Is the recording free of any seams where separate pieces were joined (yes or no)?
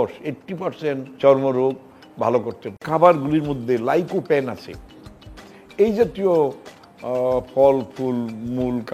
no